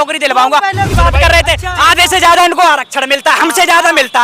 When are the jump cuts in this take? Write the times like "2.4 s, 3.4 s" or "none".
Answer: 0.9 s